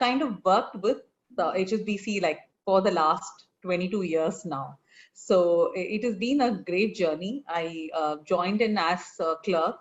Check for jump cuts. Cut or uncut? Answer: uncut